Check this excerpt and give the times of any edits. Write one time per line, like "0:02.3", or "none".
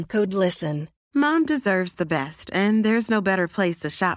0:00.9